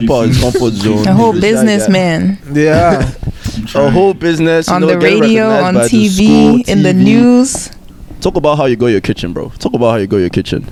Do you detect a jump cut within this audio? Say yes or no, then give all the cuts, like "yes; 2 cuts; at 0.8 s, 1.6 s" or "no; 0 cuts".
no; 0 cuts